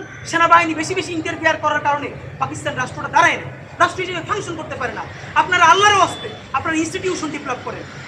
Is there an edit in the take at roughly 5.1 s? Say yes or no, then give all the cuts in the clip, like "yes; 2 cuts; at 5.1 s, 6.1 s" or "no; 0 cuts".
no; 0 cuts